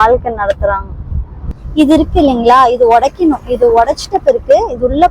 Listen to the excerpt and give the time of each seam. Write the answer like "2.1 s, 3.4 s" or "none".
1.6 s

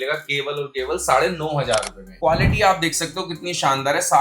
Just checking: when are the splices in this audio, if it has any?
2.1 s

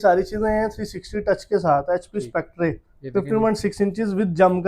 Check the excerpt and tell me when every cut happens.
none

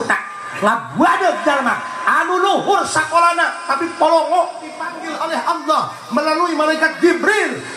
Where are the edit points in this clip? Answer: 5.0 s

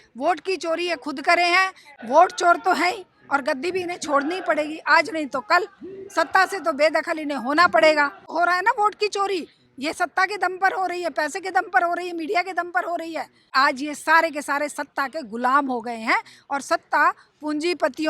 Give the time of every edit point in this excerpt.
1.9 s, 8.3 s, 13.5 s

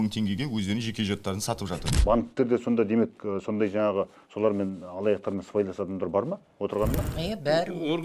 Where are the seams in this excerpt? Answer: 1.9 s, 7.1 s

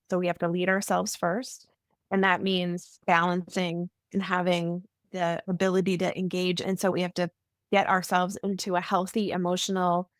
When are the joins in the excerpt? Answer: 3.0 s, 6.9 s

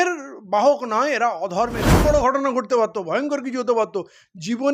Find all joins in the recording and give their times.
1.9 s

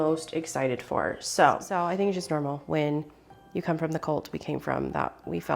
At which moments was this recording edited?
1.7 s

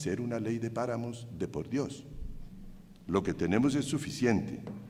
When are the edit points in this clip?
none

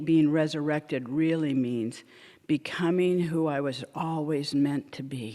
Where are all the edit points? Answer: none

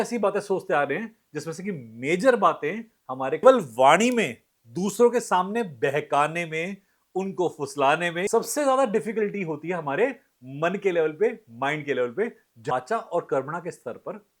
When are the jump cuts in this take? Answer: 3.4 s, 8.3 s, 12.7 s

